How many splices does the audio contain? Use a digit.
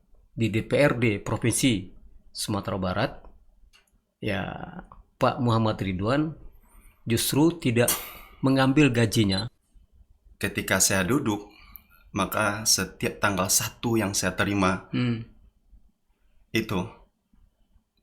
1